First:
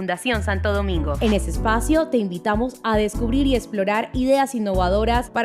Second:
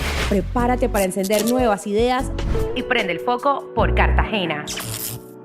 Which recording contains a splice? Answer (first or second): first